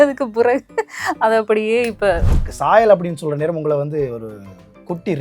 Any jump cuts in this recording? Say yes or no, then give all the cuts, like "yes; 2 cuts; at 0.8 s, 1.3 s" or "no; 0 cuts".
yes; 1 cut; at 2.3 s